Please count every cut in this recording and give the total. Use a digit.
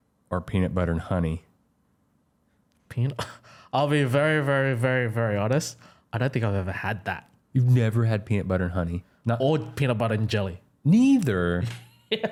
0